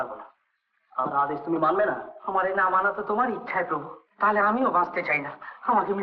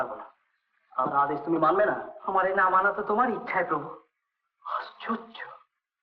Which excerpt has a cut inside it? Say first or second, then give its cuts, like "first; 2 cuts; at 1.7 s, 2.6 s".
first; 1 cut; at 4.0 s